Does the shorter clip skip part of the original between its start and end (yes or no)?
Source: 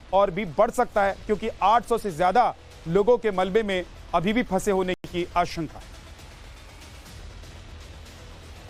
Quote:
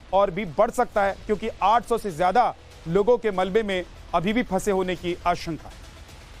yes